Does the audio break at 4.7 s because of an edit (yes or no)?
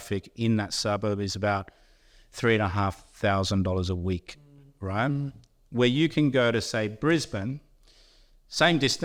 no